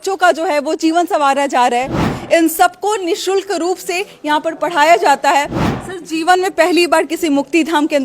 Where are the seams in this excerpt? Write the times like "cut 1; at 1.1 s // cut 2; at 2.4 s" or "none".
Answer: cut 1; at 2.0 s // cut 2; at 5.6 s

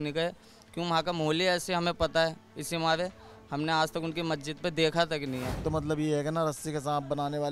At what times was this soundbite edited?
cut 1; at 5.6 s

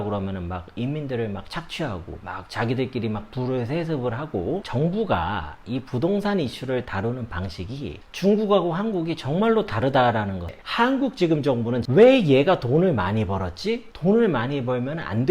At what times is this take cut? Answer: cut 1; at 4.6 s // cut 2; at 10.6 s // cut 3; at 11.8 s

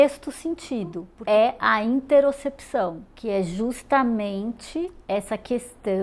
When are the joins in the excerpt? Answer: cut 1; at 1.1 s

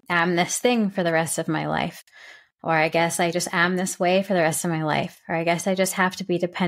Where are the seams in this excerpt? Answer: none

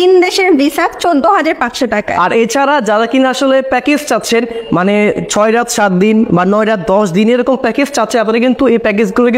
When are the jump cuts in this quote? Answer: none

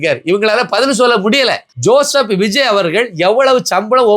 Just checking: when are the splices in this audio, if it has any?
cut 1; at 1.7 s

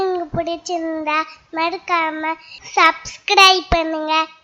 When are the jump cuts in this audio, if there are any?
none

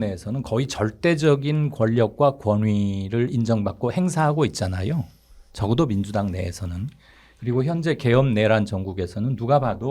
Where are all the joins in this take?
none

